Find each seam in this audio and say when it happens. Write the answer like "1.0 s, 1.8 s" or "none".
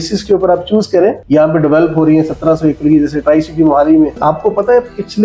1.2 s, 4.2 s